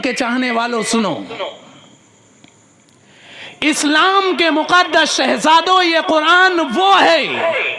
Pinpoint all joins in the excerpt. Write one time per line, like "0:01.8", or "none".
0:03.0